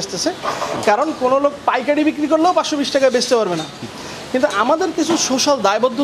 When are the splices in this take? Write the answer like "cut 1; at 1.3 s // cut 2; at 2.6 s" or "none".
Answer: none